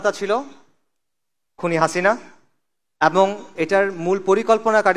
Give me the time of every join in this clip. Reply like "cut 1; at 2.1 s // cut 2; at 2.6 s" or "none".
none